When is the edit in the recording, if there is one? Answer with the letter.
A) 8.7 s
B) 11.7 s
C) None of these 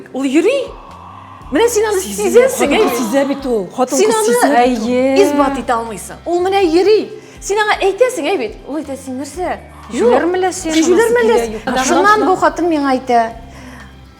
B